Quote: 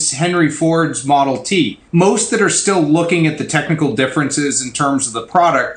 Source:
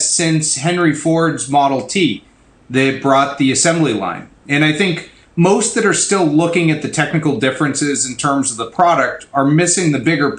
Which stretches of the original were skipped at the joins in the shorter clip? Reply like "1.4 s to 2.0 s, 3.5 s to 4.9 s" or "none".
2.2 s to 5.2 s

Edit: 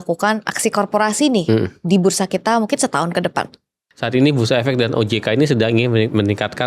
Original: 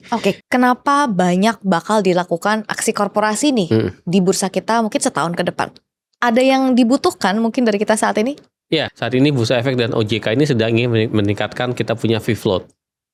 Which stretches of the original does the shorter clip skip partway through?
6.1 s to 8.9 s

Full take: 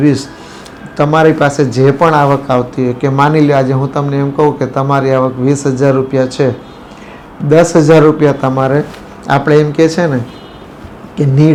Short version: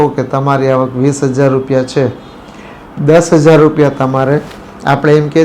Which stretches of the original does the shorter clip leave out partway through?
none

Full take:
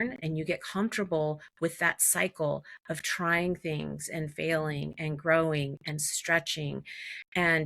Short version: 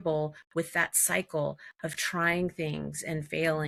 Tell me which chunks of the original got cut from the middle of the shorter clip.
none

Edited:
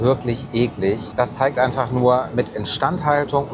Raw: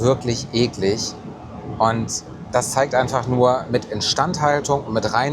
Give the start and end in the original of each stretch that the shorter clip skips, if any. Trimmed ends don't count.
1.1 s to 2.4 s

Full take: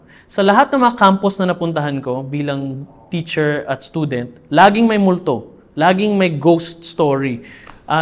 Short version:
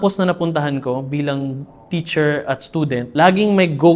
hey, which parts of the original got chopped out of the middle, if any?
4.2 s to 5.6 s

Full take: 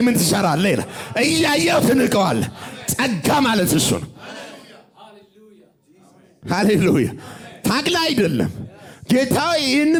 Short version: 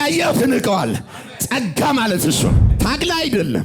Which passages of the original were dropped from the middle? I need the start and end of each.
4.1 s to 7.5 s

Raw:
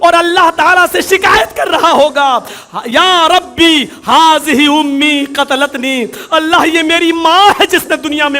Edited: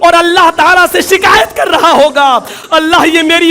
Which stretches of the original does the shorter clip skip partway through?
2.6 s to 6.2 s

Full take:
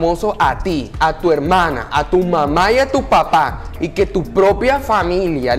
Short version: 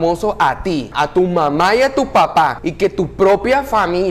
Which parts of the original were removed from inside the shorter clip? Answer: 0.9 s to 1.8 s, 3.6 s to 3.8 s

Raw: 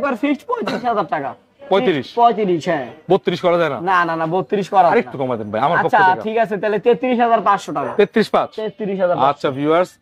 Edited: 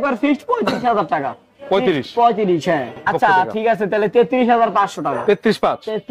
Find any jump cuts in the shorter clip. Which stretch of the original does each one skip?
3.1 s to 5.8 s

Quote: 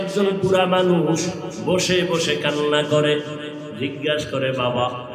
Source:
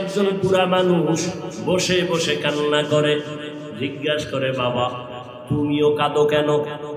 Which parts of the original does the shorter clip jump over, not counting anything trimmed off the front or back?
none

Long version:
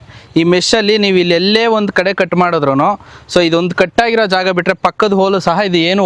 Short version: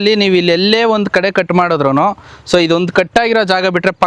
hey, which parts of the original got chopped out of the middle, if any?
none

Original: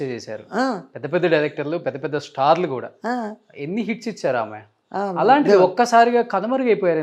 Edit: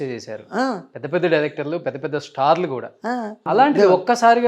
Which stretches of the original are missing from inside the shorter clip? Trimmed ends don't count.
3.4 s to 5.1 s

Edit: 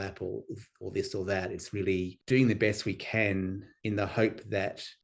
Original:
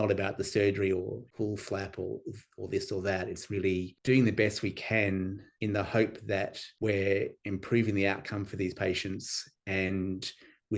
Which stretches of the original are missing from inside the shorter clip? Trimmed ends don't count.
none

